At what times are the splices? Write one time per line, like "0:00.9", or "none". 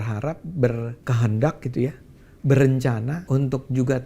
0:01.0
0:03.2